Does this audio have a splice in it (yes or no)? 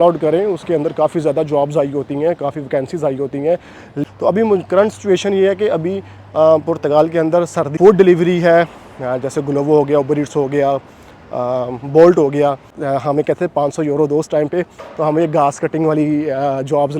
yes